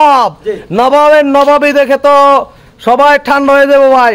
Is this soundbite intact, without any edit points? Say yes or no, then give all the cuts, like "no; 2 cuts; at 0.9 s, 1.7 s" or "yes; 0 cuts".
yes; 0 cuts